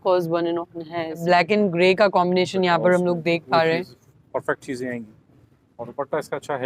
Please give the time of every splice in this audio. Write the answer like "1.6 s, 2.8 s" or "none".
1.2 s, 4.0 s